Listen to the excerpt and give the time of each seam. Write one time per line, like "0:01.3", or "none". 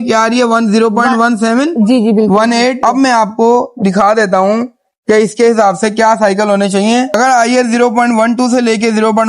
0:02.8
0:07.2